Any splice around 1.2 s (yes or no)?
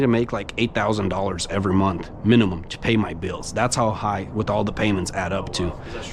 no